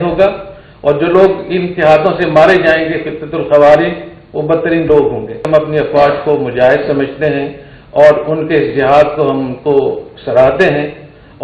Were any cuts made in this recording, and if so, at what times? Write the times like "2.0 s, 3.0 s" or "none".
5.4 s